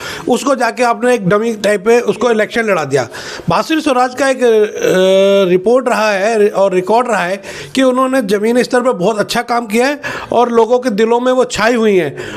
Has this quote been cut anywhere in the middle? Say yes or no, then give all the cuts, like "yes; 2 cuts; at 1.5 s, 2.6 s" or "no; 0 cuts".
no; 0 cuts